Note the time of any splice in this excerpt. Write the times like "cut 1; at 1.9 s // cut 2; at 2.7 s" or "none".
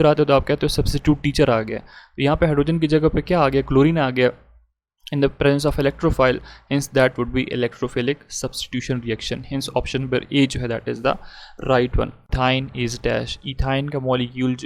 cut 1; at 12.2 s